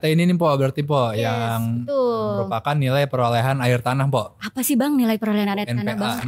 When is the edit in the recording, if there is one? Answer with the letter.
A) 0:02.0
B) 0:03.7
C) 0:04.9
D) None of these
D